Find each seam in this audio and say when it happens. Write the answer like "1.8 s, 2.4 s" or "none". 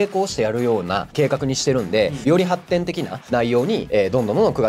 2.2 s